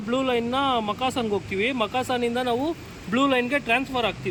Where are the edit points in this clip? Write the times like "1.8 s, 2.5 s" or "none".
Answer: none